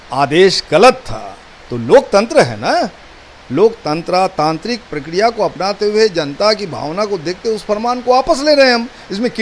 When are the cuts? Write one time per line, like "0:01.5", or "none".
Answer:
none